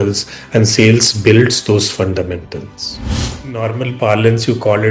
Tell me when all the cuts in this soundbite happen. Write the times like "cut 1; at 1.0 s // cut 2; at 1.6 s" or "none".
cut 1; at 3.4 s